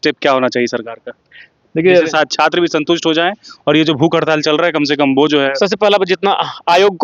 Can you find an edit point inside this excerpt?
no; 0 cuts

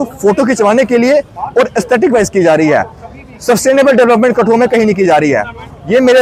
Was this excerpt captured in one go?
yes; 0 cuts

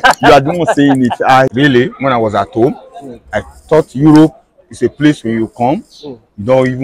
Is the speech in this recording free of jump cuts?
no; 1 cut; at 1.5 s

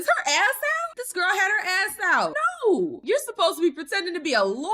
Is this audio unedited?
no; 3 cuts; at 0.9 s, 2.4 s, 3.0 s

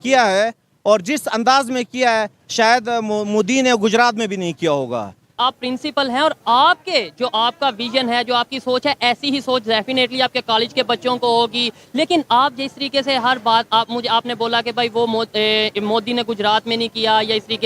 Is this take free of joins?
no; 1 cut; at 5.2 s

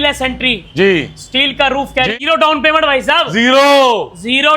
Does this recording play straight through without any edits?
no; 1 cut; at 2.2 s

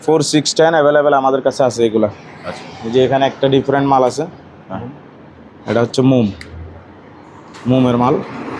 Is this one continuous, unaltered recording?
yes; 0 cuts

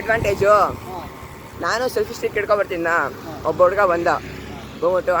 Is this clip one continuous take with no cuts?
yes; 0 cuts

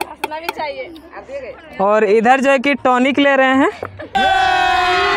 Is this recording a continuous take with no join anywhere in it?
yes; 0 cuts

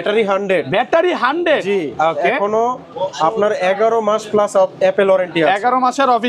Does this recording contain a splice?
no; 0 cuts

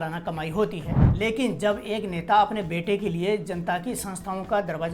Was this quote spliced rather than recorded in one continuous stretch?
yes; 1 cut; at 1.0 s

